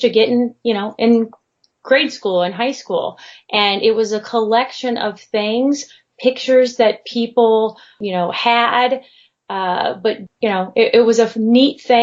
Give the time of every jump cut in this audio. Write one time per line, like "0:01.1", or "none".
0:08.0
0:10.2